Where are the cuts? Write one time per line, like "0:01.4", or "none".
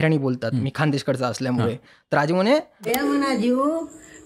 0:02.8

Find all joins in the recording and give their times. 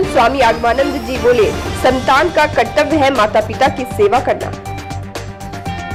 none

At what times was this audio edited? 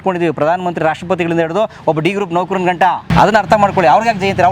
0:03.1

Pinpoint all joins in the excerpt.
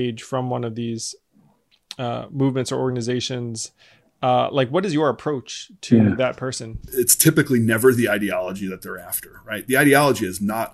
0:06.9

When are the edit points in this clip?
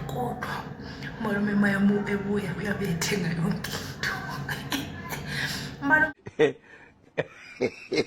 0:06.1

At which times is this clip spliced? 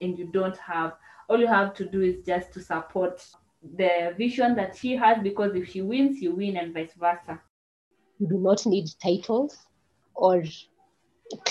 0:07.5

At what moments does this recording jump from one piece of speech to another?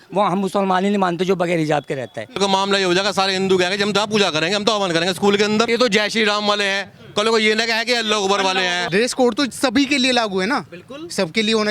0:02.4
0:05.7
0:08.8

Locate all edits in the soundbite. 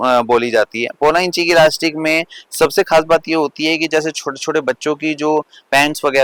none

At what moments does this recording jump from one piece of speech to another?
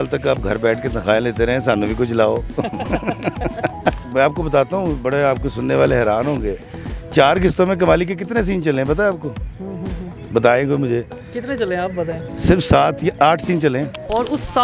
none

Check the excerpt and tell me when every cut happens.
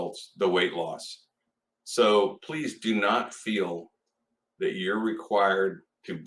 none

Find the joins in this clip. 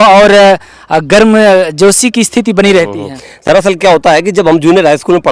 none

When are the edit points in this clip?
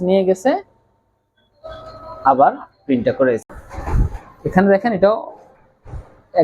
0:03.5

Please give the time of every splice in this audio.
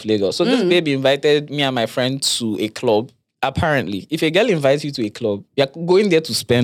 0:03.3

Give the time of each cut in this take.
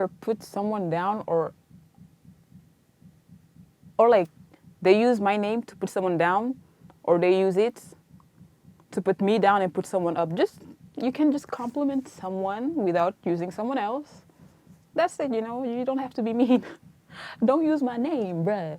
none

